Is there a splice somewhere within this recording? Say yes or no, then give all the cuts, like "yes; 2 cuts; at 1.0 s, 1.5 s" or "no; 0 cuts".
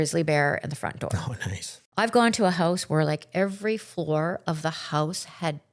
yes; 1 cut; at 1.8 s